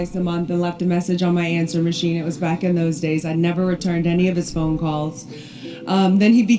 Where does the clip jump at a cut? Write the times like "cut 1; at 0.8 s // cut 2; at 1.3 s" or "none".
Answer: none